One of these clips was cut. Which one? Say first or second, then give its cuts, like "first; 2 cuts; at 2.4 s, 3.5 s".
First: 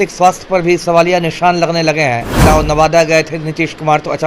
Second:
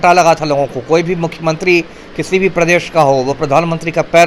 first; 1 cut; at 2.4 s